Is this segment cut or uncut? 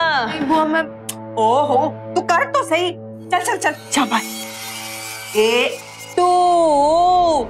uncut